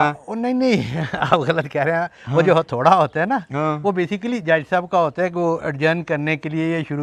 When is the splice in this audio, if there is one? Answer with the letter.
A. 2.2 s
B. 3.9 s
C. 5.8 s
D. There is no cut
D